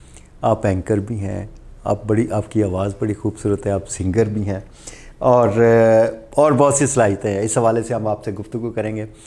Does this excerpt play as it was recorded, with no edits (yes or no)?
yes